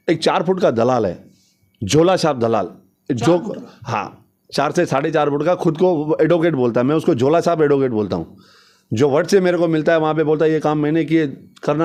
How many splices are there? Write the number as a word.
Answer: zero